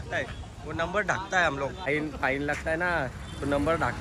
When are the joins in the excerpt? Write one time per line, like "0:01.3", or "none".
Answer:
0:01.9

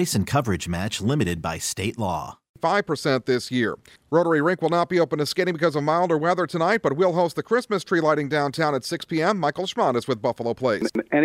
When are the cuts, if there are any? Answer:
0:02.5

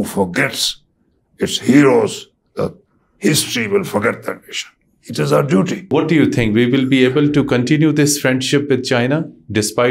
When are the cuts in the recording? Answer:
0:05.9

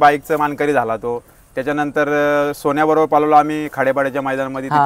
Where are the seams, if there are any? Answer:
none

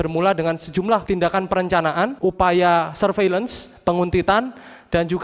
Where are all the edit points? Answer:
0:01.0
0:02.1

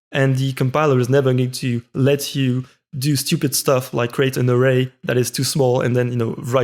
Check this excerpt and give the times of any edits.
none

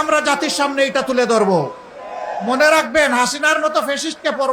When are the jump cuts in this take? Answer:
none

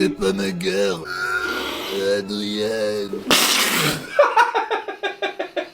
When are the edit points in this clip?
0:01.1

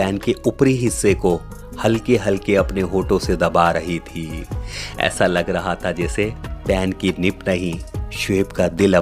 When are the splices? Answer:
none

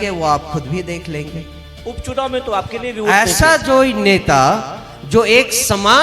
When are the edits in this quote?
none

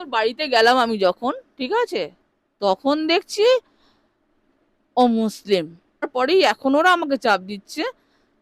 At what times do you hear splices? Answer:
0:06.2

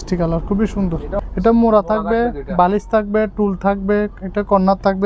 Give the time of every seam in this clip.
0:01.2

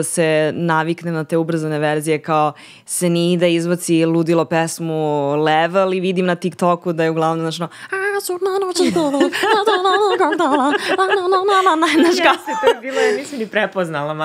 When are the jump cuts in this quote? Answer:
none

